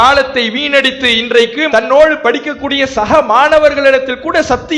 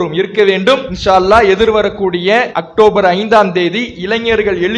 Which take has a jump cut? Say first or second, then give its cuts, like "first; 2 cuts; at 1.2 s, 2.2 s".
second; 2 cuts; at 0.9 s, 2.6 s